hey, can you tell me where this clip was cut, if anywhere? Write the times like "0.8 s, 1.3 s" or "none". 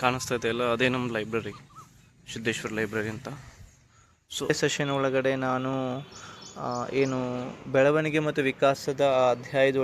4.5 s